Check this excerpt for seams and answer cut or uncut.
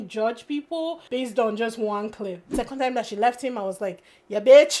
cut